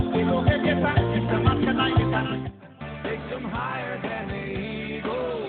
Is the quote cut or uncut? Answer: cut